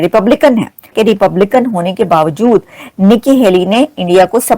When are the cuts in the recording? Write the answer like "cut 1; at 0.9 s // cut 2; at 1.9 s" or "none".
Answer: cut 1; at 0.9 s